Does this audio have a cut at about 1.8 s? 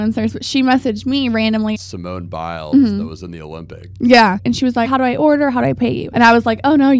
yes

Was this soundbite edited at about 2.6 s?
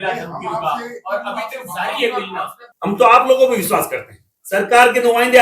yes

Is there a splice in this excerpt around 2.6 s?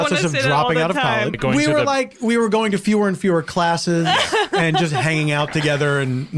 no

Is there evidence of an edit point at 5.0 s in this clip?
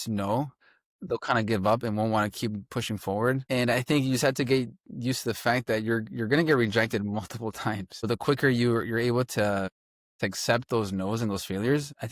no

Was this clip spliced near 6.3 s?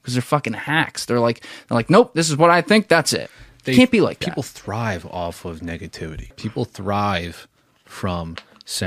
yes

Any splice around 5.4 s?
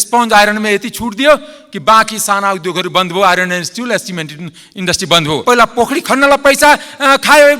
yes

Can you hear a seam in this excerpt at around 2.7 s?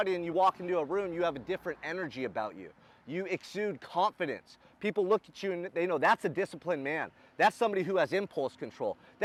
no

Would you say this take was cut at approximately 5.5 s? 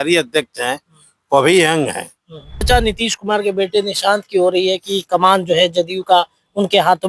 no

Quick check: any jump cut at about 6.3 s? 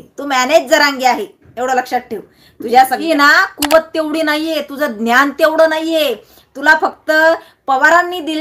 no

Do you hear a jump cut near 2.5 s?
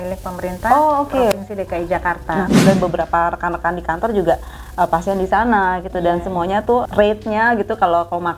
yes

